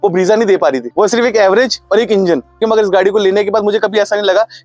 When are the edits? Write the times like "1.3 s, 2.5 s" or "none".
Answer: 0.8 s, 2.6 s